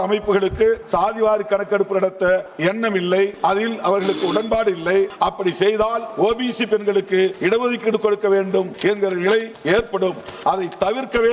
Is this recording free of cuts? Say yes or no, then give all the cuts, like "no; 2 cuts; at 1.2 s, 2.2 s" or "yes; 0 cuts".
no; 8 cuts; at 0.8 s, 2.5 s, 3.3 s, 5.1 s, 6.1 s, 7.4 s, 8.7 s, 9.5 s